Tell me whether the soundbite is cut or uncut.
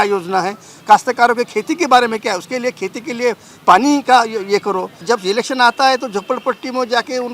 cut